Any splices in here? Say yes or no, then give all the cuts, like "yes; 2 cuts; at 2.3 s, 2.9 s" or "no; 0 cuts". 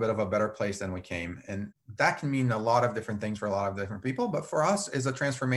no; 0 cuts